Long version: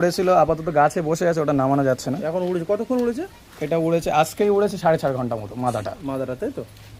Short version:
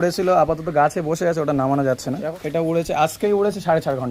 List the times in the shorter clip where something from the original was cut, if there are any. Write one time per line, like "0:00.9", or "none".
0:02.3